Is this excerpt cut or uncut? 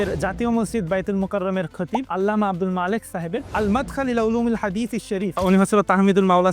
cut